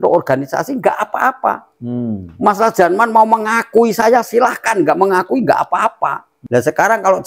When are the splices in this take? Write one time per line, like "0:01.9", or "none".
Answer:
0:06.3